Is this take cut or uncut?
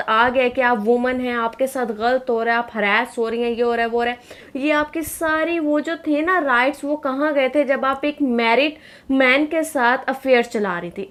uncut